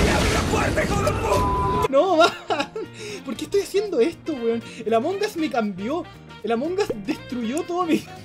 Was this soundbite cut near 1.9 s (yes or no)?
yes